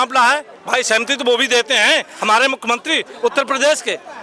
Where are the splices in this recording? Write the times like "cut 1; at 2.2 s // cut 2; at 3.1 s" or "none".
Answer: none

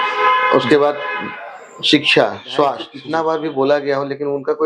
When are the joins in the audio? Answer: cut 1; at 2.9 s

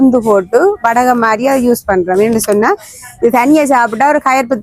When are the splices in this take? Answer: none

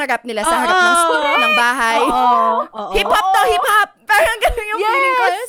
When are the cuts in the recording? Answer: none

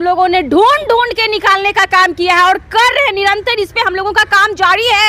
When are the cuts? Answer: none

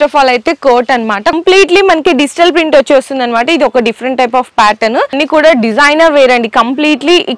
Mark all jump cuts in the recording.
cut 1; at 1.4 s // cut 2; at 5.2 s

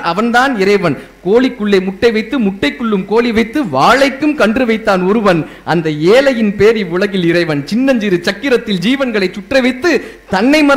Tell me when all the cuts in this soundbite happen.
none

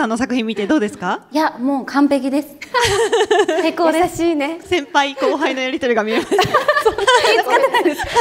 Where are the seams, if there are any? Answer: cut 1; at 4.6 s // cut 2; at 7.2 s

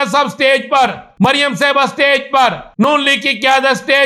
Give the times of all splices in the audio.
cut 1; at 1.3 s // cut 2; at 2.8 s

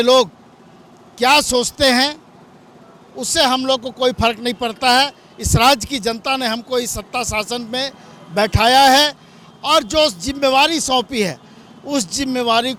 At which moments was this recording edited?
none

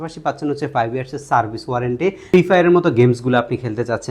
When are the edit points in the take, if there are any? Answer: cut 1; at 2.2 s

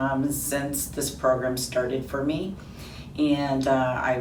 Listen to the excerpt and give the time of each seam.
none

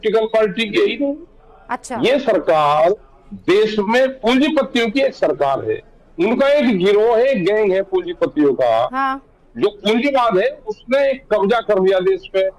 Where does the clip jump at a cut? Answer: none

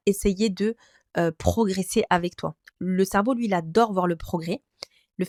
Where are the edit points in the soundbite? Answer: none

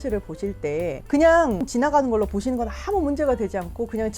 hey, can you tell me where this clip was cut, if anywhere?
cut 1; at 1.0 s // cut 2; at 1.7 s

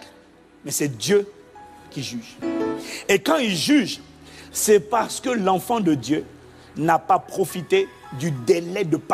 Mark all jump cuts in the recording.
cut 1; at 2.3 s

